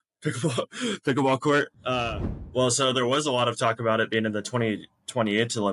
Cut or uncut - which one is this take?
cut